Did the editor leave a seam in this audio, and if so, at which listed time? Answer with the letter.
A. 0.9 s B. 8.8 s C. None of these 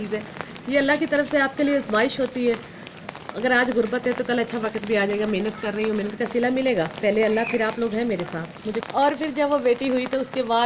B